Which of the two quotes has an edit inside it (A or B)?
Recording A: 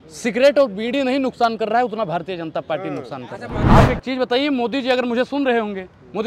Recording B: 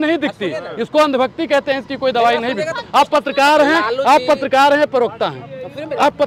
A